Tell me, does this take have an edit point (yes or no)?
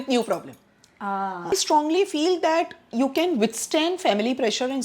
yes